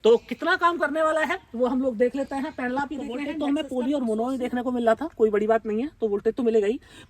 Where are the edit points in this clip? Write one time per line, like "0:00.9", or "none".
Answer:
0:03.3

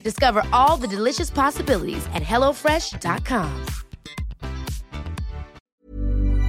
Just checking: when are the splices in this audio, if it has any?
0:05.6

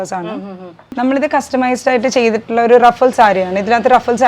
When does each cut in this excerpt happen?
0:01.0

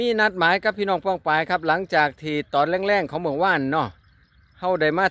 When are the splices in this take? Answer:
none

